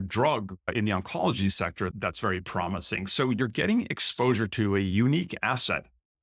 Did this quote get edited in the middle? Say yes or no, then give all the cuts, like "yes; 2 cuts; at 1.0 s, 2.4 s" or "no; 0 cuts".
yes; 1 cut; at 1.9 s